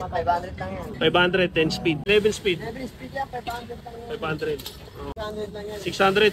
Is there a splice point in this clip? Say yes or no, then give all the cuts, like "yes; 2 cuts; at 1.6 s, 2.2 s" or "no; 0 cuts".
yes; 2 cuts; at 2.0 s, 5.1 s